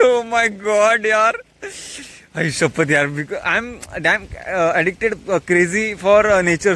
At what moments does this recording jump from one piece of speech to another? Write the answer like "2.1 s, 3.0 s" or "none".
none

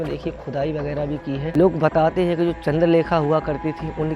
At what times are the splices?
1.5 s

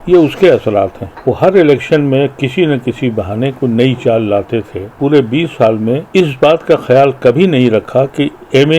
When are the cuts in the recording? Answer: 1.1 s, 4.9 s, 6.0 s

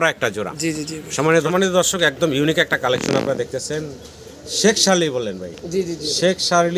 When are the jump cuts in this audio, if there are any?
1.5 s

